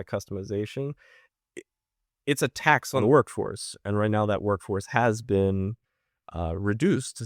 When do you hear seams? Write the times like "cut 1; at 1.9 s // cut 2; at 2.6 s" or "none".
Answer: cut 1; at 3.0 s